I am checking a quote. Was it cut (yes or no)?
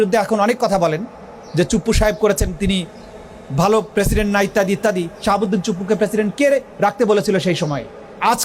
no